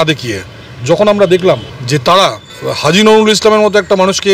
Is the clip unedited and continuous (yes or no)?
no